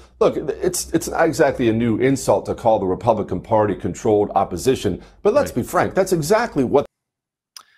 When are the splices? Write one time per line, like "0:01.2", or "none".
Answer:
none